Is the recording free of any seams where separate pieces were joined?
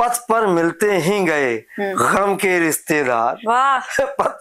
yes; 0 cuts

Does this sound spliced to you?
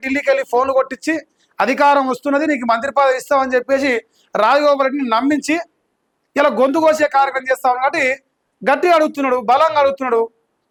no; 0 cuts

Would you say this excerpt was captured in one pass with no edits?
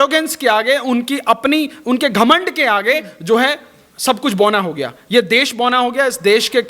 yes; 0 cuts

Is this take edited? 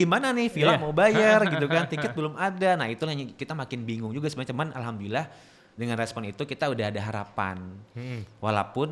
no; 0 cuts

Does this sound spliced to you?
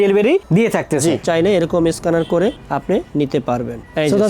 yes; 1 cut; at 1.2 s

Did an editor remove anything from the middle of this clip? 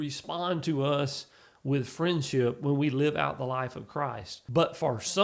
yes; 1 cut; at 4.3 s

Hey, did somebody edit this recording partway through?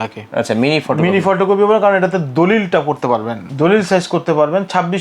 yes; 1 cut; at 3.4 s

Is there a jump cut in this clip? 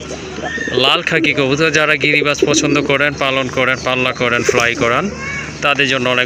no; 0 cuts

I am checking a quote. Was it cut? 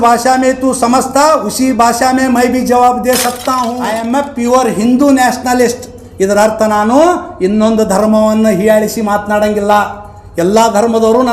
yes; 1 cut; at 4.0 s

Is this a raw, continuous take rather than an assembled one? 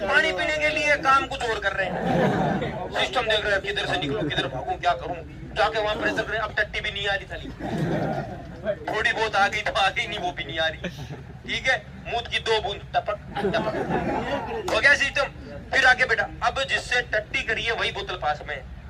yes; 0 cuts

